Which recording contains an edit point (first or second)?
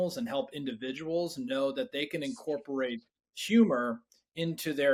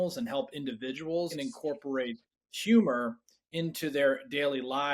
second